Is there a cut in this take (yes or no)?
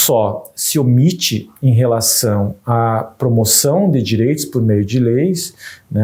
no